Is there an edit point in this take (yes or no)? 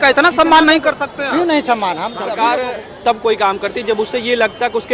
yes